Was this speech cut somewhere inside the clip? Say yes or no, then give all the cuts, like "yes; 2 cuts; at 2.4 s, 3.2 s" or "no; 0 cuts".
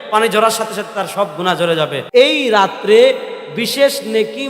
yes; 1 cut; at 2.1 s